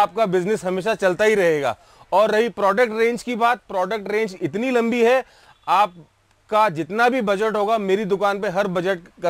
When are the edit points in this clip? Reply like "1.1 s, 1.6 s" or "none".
none

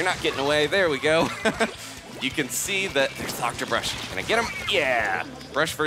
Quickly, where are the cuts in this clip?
none

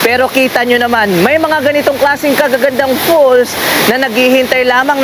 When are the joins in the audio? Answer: none

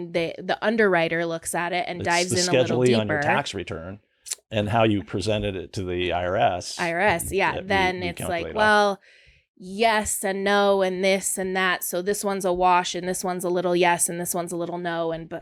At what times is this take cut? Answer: none

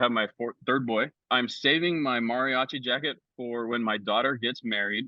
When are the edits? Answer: 1.2 s

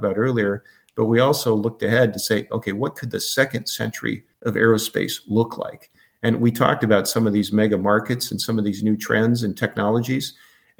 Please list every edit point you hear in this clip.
4.3 s

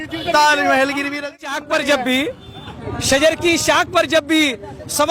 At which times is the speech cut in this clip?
1.4 s

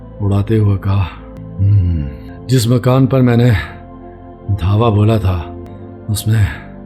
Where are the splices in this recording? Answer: 1.3 s, 2.2 s, 5.7 s

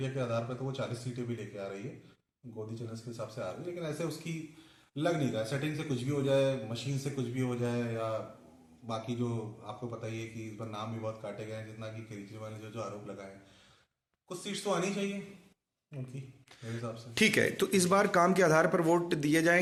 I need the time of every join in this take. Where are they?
none

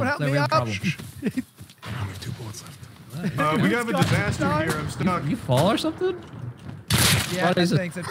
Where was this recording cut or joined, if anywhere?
none

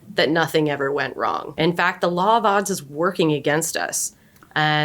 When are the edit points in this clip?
1.5 s

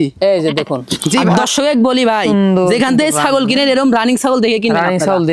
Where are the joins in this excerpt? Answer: 1.3 s

